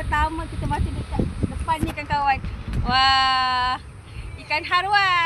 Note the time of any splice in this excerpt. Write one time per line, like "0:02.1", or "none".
none